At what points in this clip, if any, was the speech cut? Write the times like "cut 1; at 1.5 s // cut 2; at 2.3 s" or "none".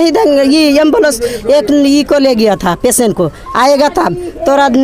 none